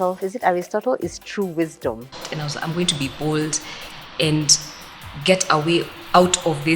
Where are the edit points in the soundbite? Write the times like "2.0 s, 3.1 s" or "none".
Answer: 2.2 s